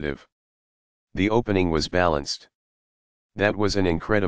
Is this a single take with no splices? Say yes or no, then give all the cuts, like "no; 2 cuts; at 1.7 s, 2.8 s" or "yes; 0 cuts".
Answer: yes; 0 cuts